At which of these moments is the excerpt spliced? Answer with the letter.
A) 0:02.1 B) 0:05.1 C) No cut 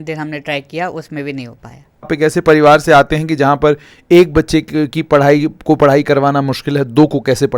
A